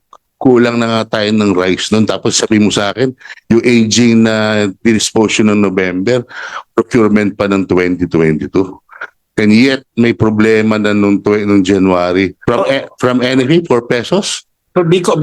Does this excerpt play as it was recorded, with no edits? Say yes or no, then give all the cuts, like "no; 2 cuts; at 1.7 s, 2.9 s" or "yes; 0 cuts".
no; 1 cut; at 12.4 s